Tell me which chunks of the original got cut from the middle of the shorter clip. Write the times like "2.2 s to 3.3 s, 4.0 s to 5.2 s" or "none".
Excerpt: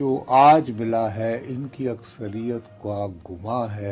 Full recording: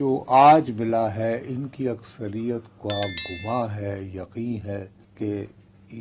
none